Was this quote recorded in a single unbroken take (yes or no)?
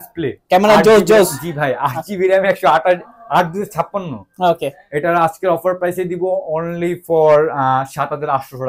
yes